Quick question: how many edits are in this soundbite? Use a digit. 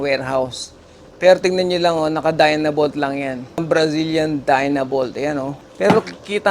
2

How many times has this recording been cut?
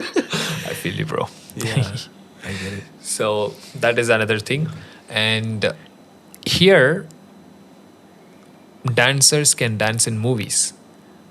0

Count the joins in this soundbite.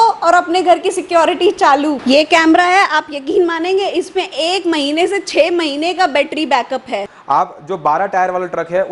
2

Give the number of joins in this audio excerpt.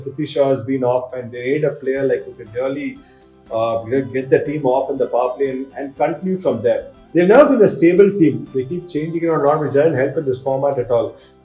1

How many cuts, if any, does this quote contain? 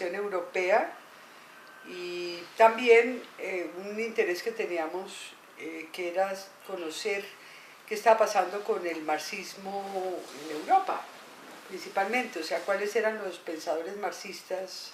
0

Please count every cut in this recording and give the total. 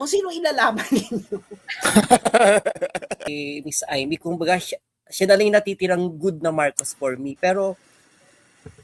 1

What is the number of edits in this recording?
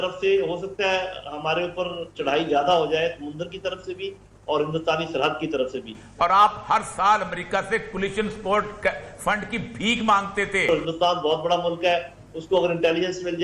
2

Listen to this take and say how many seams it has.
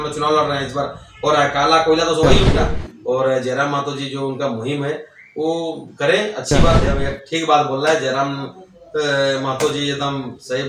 2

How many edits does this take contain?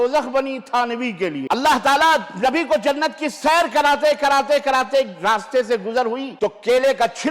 2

